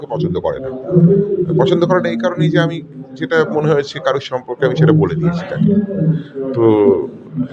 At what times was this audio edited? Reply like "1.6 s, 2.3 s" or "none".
none